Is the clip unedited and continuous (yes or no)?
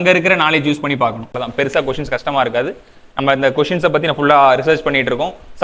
no